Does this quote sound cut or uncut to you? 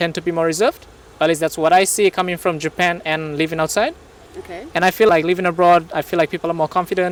uncut